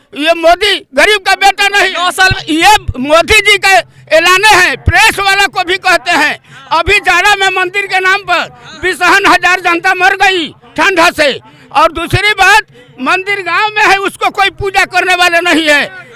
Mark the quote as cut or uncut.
cut